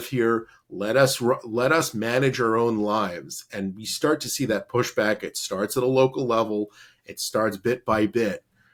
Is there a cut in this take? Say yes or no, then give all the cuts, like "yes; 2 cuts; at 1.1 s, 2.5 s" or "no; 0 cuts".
no; 0 cuts